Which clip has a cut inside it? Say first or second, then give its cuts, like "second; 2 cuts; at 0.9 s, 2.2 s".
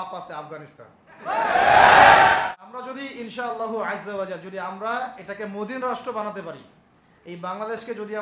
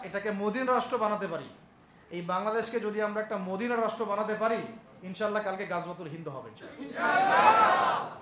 first; 1 cut; at 2.4 s